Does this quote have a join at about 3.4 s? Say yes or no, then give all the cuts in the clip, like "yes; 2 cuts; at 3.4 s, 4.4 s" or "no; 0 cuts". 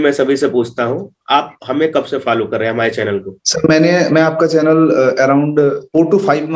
no; 0 cuts